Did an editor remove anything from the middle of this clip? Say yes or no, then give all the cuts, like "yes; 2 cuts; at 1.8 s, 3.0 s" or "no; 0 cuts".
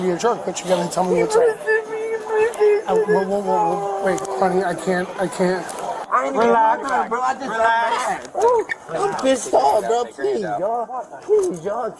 yes; 1 cut; at 5.9 s